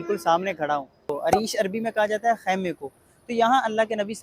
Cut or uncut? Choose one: cut